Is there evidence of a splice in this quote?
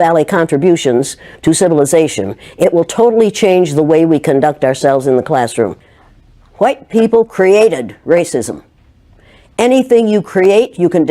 yes; 1 cut; at 5.8 s

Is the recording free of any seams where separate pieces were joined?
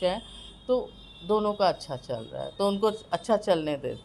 yes; 0 cuts

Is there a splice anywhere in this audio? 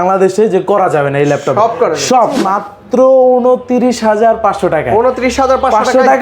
yes; 1 cut; at 2.4 s

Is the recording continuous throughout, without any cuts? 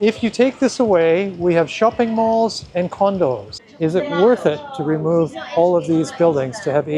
no; 1 cut; at 3.5 s

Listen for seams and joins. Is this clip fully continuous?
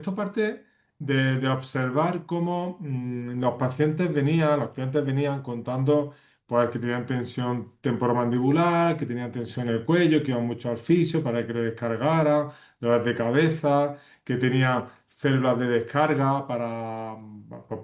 no; 1 cut; at 0.9 s

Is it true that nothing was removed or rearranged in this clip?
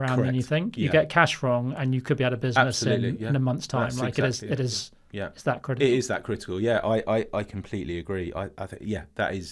yes; 0 cuts

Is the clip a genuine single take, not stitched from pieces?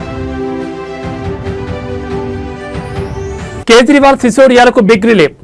no; 1 cut; at 3.6 s

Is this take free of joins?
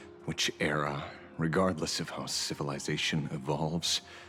yes; 0 cuts

